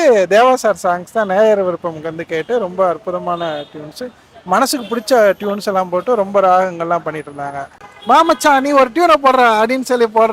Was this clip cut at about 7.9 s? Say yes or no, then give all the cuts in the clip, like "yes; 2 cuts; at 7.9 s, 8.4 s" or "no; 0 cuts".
yes; 1 cut; at 7.9 s